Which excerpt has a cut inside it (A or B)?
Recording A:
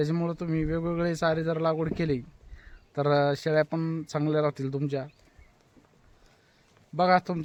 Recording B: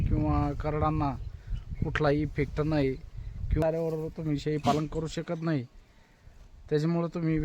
B